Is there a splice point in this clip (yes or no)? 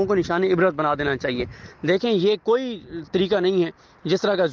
no